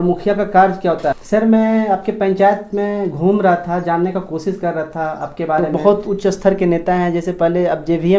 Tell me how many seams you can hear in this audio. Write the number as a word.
two